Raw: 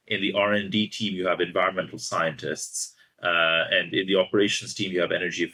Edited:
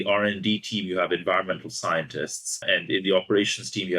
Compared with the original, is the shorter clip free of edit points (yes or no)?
no